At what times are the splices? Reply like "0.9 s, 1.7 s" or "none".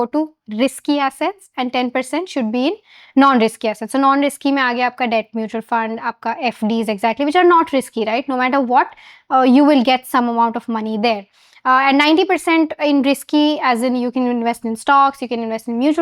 none